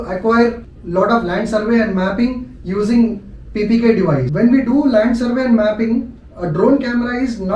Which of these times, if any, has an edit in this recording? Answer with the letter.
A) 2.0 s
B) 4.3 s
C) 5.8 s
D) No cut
B